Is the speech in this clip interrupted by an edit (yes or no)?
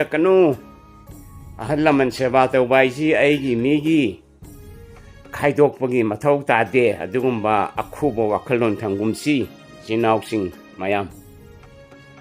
yes